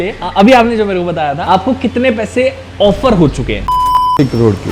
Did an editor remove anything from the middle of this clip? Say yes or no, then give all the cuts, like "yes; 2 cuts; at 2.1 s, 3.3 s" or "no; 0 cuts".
no; 0 cuts